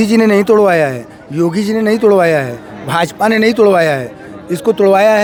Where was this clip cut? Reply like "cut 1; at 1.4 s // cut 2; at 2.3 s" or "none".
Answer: none